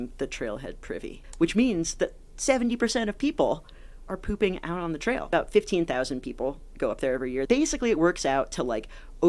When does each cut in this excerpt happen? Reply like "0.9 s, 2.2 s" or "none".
1.2 s, 5.2 s, 7.4 s